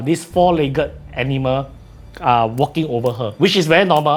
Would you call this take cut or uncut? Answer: uncut